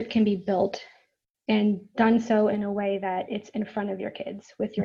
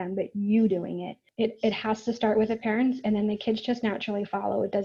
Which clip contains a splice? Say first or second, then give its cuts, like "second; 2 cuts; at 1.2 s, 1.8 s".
second; 1 cut; at 1.3 s